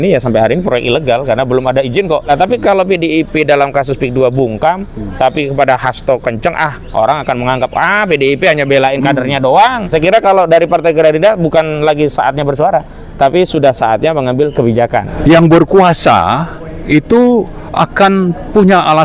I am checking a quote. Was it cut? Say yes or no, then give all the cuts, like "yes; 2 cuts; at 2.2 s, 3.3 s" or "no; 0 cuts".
yes; 3 cuts; at 2.3 s, 9.9 s, 15.1 s